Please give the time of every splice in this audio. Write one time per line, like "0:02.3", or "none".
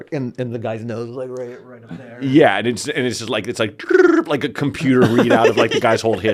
none